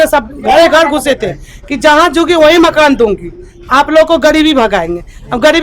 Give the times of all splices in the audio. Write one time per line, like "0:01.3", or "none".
none